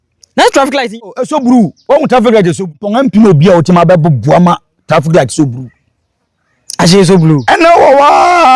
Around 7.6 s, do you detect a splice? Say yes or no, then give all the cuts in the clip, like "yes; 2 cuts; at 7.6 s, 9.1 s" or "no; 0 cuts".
no; 2 cuts; at 1.1 s, 2.8 s